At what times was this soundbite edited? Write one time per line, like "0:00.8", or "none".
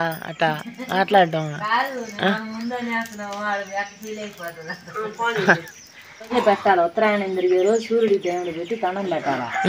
0:06.3